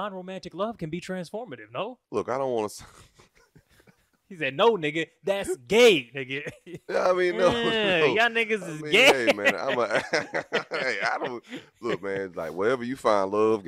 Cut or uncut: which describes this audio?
cut